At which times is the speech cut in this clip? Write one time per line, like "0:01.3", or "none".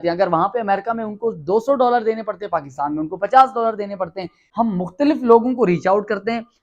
0:04.4

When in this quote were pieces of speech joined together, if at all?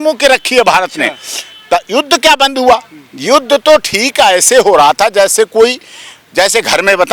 none

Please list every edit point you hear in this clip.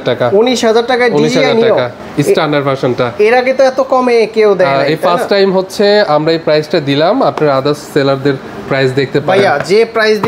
none

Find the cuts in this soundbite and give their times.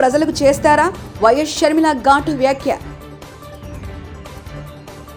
none

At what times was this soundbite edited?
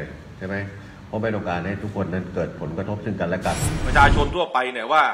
0:03.8

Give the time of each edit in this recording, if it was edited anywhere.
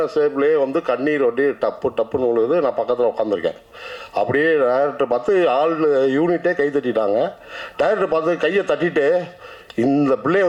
none

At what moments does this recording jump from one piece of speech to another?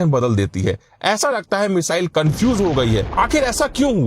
0:03.1

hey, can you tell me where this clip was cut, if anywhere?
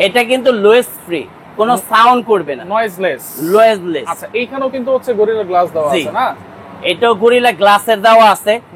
none

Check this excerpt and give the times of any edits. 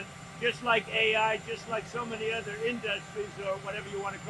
none

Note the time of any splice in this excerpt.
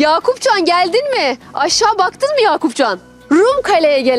0:03.1

